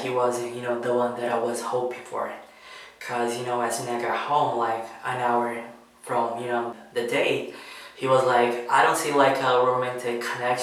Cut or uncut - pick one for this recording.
uncut